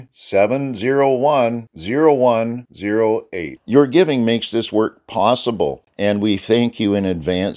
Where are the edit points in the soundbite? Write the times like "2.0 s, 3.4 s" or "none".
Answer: 5.8 s

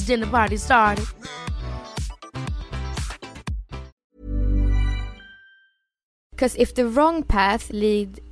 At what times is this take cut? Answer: 3.9 s, 6.3 s

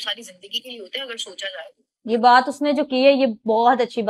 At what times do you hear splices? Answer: none

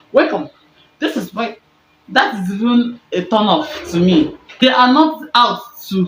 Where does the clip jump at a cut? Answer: none

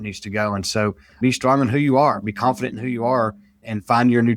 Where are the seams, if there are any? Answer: 1.1 s

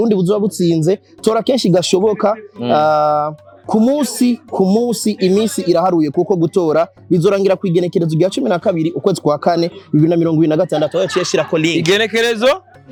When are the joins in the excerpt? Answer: none

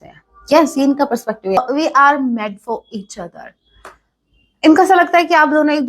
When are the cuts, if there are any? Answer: 1.6 s

